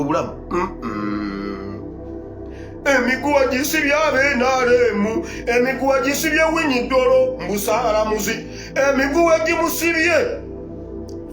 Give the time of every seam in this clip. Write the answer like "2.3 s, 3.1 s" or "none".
1.7 s, 2.8 s